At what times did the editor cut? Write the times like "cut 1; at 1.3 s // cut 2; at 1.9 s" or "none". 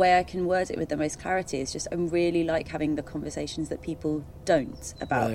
none